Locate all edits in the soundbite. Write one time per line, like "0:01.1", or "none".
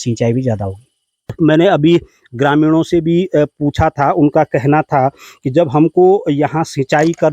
0:01.4